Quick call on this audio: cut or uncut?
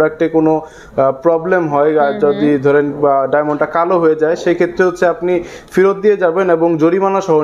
uncut